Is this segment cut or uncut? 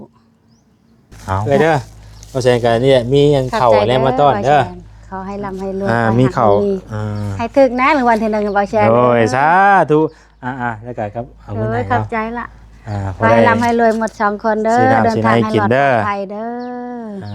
cut